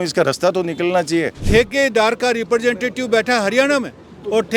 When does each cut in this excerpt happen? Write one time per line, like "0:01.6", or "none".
0:01.4